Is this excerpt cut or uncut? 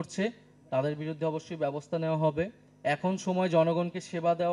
cut